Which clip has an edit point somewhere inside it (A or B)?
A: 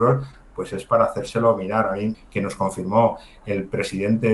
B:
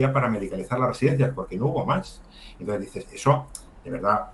A